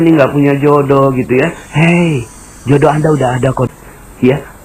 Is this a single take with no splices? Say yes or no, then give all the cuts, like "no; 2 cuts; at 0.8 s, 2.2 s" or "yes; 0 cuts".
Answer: no; 1 cut; at 3.7 s